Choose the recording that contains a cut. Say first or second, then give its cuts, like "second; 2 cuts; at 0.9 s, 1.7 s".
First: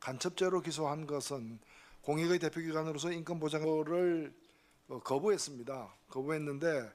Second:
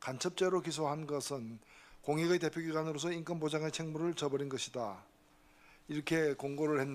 second; 1 cut; at 3.6 s